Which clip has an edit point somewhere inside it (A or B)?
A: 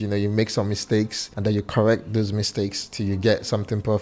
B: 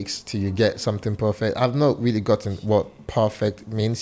A